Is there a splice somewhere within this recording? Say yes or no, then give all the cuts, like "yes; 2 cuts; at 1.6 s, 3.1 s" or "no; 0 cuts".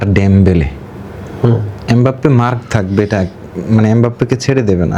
no; 0 cuts